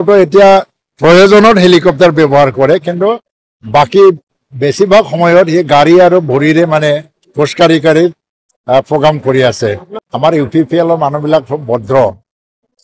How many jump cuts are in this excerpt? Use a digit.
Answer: 1